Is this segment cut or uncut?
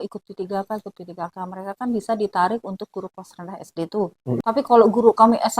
cut